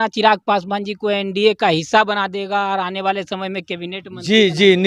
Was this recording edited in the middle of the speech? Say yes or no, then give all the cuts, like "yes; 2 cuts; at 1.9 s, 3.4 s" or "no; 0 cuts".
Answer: no; 0 cuts